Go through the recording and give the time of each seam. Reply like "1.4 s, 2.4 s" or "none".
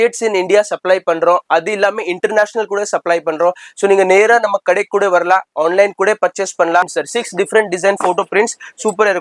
6.9 s